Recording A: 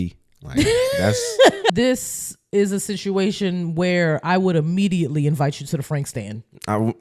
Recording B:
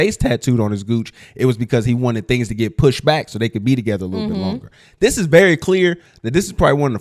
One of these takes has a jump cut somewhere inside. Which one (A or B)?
A